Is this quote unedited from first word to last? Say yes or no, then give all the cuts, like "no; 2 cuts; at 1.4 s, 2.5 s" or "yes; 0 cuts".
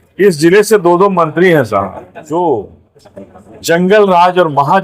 no; 1 cut; at 2.1 s